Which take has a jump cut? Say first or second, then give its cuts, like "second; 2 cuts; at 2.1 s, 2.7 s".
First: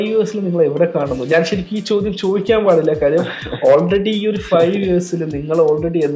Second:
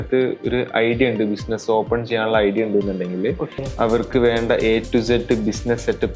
second; 1 cut; at 3.5 s